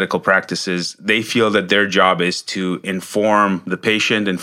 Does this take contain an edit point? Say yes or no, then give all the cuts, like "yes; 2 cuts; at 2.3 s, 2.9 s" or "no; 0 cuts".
no; 0 cuts